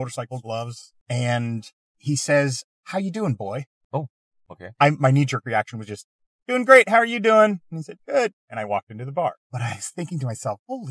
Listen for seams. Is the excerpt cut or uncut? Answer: cut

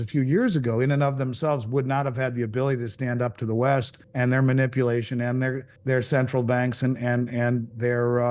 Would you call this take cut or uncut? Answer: cut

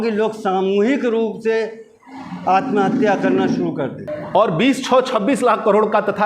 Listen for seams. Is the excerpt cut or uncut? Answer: cut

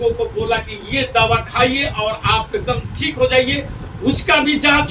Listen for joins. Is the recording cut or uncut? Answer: uncut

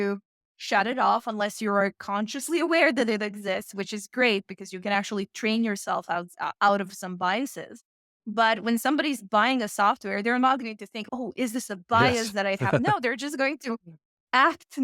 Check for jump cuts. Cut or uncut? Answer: uncut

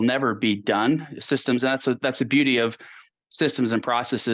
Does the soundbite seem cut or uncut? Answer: uncut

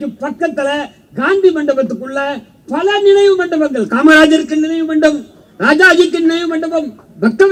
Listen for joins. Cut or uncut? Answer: uncut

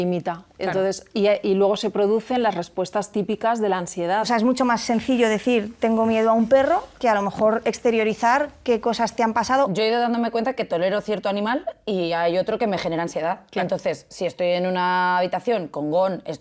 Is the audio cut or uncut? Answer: cut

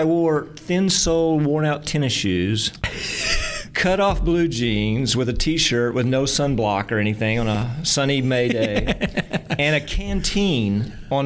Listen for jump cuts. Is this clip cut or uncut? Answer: uncut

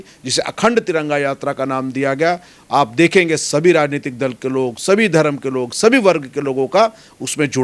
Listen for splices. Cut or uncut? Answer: uncut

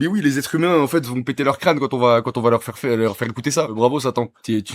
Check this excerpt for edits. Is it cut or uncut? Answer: cut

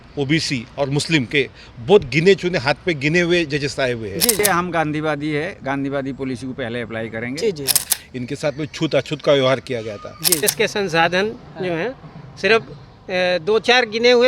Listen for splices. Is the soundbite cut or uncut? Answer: cut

